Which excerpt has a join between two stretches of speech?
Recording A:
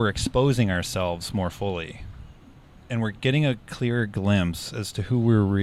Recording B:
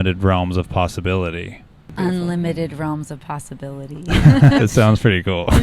B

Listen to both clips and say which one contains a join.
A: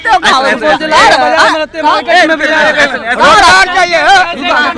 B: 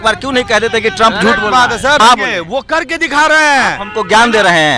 B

